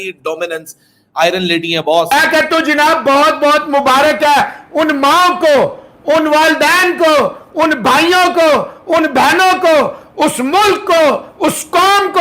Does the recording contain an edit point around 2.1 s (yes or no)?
yes